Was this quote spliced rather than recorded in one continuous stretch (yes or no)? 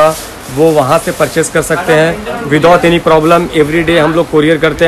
no